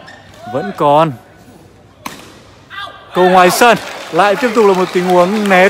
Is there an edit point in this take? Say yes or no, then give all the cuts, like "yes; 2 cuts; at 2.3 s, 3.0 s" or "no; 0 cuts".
no; 0 cuts